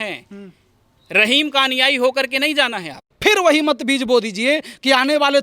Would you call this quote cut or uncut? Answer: cut